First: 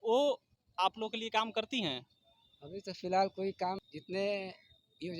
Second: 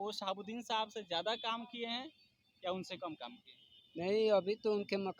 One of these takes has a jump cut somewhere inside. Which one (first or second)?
first